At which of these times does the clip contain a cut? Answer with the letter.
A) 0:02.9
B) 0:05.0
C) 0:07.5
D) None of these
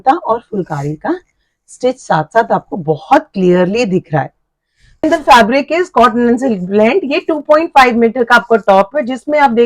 B